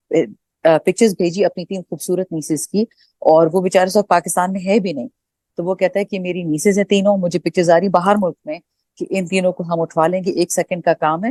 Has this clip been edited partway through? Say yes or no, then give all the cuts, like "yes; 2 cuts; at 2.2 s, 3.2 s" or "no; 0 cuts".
no; 0 cuts